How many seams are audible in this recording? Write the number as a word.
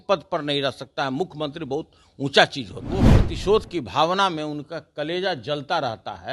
one